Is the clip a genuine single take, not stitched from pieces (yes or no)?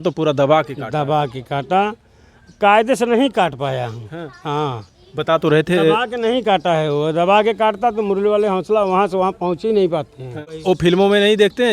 no